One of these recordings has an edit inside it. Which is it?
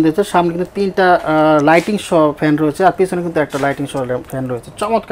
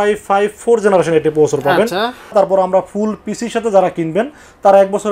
second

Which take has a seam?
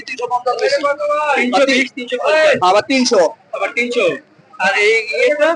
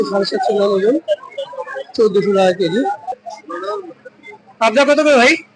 second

